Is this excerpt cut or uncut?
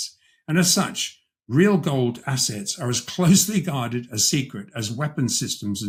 uncut